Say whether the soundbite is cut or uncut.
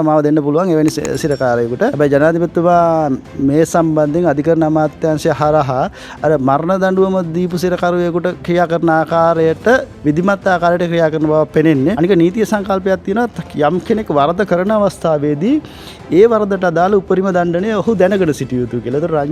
cut